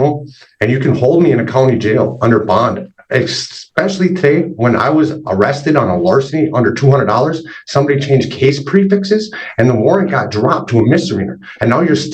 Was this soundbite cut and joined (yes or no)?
no